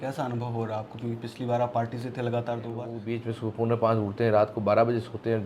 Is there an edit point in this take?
yes; 1 cut; at 3.0 s

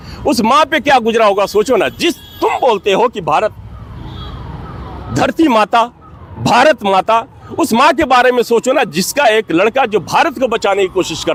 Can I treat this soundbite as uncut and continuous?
yes; 0 cuts

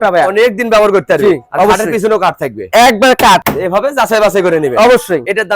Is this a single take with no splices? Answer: yes; 0 cuts

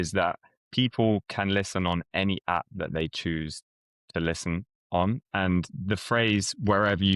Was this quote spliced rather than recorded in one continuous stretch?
no; 0 cuts

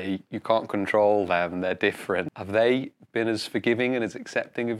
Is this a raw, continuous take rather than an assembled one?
no; 1 cut; at 2.4 s

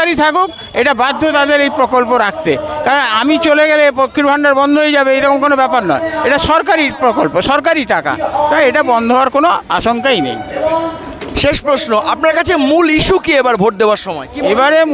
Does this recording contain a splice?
no; 0 cuts

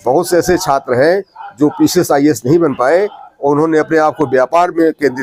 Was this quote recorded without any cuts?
yes; 0 cuts

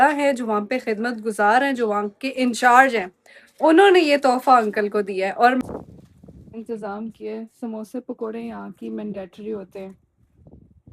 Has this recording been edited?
yes; 1 cut; at 5.6 s

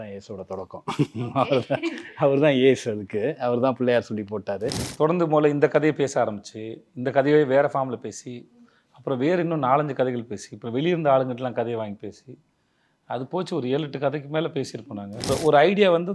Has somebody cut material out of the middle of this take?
yes; 2 cuts; at 4.8 s, 15.3 s

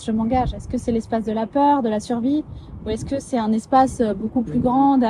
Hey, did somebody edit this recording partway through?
no; 0 cuts

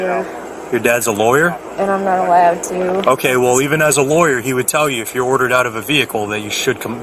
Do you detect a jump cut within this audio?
no; 0 cuts

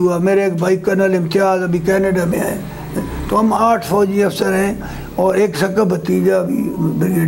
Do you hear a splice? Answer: no; 0 cuts

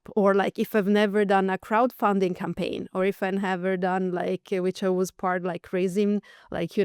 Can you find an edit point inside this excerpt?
no; 0 cuts

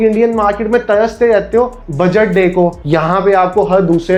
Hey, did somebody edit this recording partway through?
no; 0 cuts

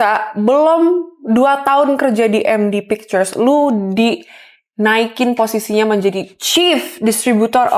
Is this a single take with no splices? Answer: yes; 0 cuts

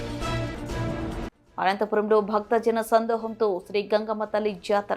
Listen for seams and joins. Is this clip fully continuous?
no; 1 cut; at 1.2 s

